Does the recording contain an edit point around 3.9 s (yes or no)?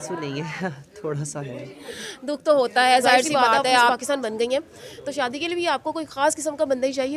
yes